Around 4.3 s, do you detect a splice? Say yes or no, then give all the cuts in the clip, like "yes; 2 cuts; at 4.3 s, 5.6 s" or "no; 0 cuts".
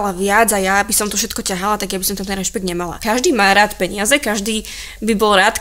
no; 1 cut; at 2.9 s